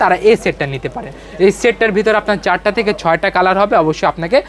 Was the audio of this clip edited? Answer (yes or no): no